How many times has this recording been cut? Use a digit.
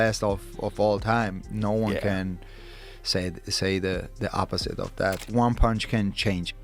1